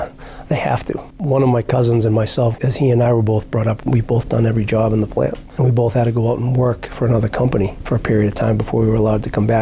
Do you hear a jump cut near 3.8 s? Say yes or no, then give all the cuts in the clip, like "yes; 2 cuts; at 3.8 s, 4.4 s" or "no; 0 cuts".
yes; 4 cuts; at 1.1 s, 2.5 s, 3.8 s, 5.4 s